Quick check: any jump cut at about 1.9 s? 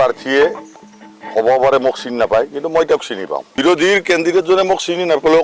no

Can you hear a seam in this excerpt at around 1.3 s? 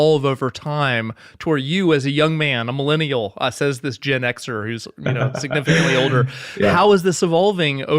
no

